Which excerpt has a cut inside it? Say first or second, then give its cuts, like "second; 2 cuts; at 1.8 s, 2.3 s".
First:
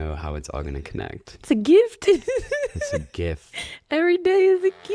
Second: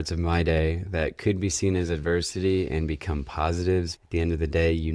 second; 1 cut; at 4.0 s